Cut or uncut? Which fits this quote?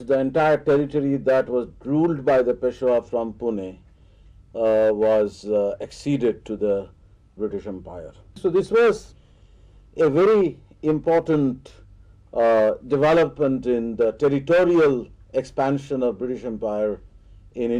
uncut